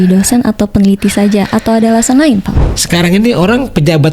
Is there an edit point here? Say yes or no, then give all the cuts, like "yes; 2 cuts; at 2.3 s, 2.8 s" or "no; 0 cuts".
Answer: yes; 1 cut; at 2.6 s